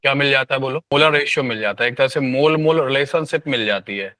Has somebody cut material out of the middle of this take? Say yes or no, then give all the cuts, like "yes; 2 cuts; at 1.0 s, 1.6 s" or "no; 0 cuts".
yes; 1 cut; at 0.9 s